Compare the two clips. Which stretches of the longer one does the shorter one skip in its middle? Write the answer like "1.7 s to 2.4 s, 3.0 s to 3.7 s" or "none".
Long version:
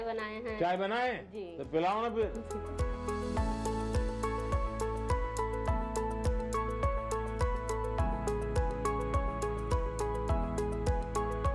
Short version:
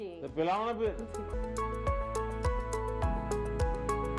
2.7 s to 6.3 s